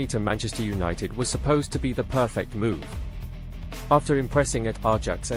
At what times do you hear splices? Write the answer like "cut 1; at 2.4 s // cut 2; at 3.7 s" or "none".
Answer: none